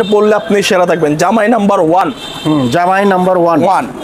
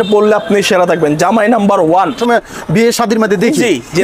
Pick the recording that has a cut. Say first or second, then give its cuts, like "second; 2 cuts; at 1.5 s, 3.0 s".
second; 1 cut; at 2.2 s